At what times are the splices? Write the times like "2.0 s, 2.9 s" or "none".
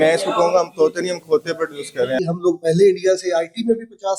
2.2 s